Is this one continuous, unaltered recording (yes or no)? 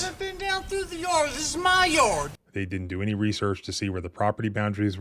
no